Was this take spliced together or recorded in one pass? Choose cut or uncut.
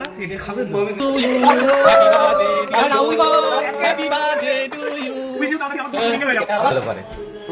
cut